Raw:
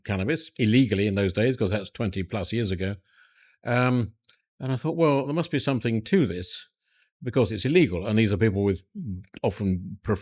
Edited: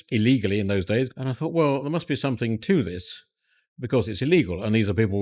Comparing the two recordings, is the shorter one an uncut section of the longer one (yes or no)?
no